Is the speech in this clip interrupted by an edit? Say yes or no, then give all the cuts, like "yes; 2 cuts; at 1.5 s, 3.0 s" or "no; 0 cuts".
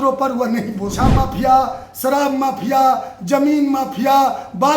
yes; 1 cut; at 1.1 s